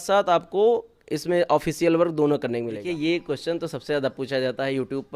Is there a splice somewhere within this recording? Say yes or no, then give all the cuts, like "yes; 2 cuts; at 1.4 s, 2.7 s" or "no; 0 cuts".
yes; 1 cut; at 2.8 s